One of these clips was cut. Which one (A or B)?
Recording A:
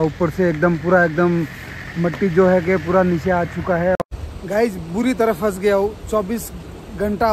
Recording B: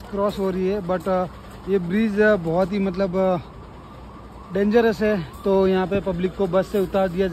A